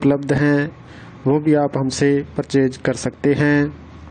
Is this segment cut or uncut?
uncut